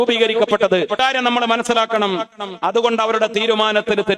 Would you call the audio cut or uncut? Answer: cut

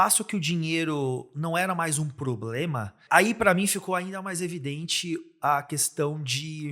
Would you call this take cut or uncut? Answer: cut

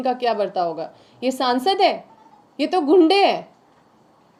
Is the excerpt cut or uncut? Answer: uncut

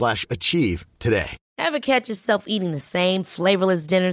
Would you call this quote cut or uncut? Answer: cut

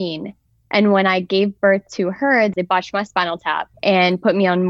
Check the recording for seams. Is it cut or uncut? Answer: cut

